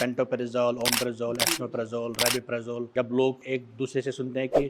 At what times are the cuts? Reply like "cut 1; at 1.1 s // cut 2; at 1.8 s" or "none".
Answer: cut 1; at 2.9 s // cut 2; at 3.4 s